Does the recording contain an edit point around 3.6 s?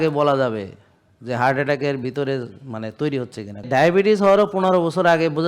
yes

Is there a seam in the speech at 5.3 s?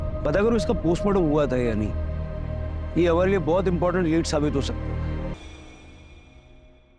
yes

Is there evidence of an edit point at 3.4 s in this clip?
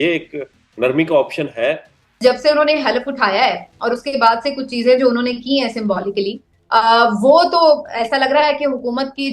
no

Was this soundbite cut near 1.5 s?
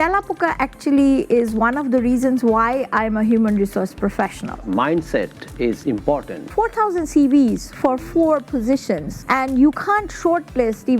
no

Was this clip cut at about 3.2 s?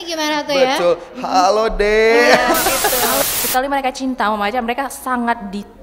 yes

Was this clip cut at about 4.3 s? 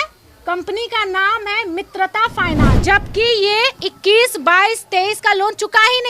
no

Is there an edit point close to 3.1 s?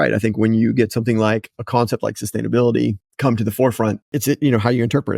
yes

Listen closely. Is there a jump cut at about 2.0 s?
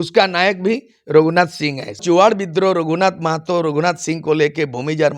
yes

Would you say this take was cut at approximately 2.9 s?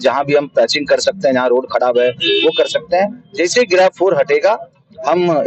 no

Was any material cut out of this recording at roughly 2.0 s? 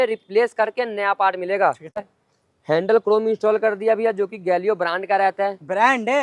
yes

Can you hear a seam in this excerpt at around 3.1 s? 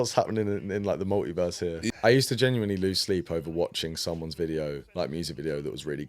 no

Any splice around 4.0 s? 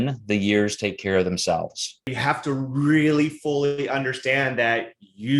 no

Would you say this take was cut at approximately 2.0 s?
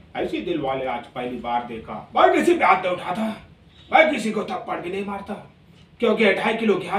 yes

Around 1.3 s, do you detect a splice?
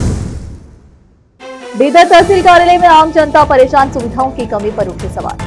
yes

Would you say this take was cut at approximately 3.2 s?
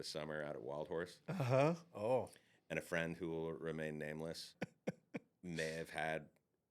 no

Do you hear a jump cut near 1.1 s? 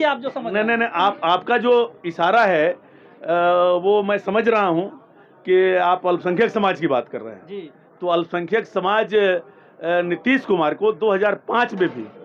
no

